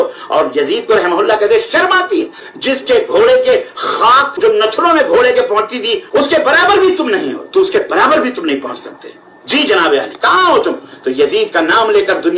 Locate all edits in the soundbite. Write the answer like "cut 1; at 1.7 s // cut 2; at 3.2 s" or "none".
cut 1; at 2.5 s // cut 2; at 4.4 s // cut 3; at 6.0 s